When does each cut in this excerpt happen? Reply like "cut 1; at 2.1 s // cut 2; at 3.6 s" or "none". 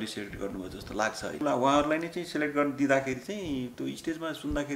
cut 1; at 1.4 s